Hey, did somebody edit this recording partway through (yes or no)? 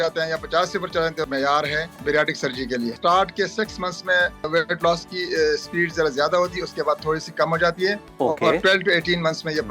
yes